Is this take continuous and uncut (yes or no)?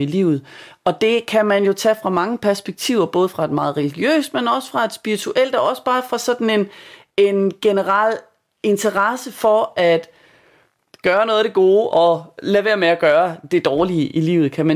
yes